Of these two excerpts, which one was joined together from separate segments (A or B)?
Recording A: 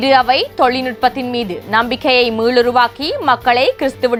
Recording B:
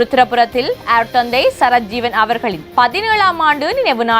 B